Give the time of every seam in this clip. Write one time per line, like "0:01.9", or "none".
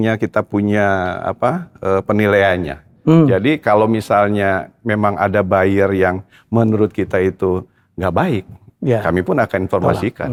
none